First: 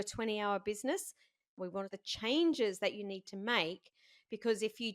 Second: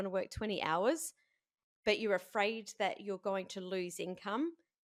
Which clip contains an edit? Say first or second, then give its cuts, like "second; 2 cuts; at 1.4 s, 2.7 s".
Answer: first; 1 cut; at 1.6 s